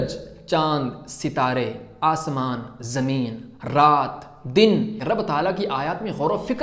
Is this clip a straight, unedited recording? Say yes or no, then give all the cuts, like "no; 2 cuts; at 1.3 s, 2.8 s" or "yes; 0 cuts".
no; 1 cut; at 5.0 s